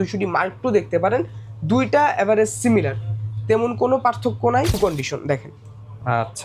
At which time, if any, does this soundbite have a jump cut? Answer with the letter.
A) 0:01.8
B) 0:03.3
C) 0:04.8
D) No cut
C